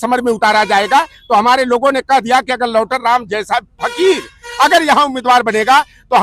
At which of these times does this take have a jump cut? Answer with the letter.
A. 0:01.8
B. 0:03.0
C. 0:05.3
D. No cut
D